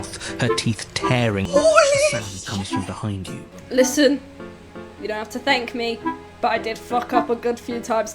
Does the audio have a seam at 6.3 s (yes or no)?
no